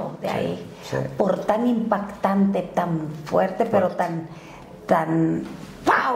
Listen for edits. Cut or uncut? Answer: uncut